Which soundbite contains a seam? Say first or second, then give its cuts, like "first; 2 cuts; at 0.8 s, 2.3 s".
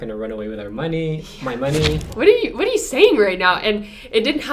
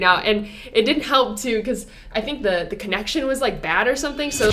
first; 1 cut; at 2.1 s